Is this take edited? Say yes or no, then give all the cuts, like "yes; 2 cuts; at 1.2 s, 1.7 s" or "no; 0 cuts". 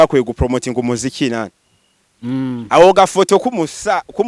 no; 0 cuts